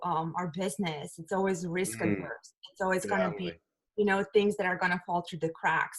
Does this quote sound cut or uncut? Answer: uncut